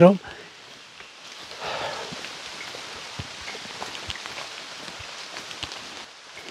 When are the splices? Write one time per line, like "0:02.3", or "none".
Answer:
none